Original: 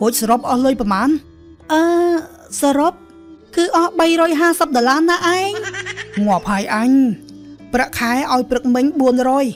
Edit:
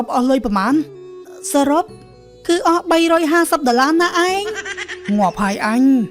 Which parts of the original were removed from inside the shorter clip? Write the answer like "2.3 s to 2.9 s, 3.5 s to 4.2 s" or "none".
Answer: 1.6 s to 2.3 s

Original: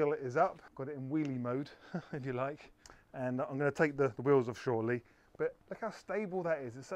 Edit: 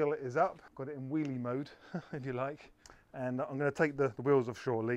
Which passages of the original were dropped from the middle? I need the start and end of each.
none

